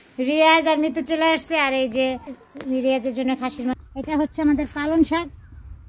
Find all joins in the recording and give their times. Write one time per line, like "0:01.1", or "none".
0:03.7